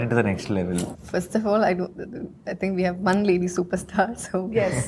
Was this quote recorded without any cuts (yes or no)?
no